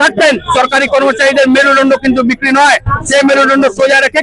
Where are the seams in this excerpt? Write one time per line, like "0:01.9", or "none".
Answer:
none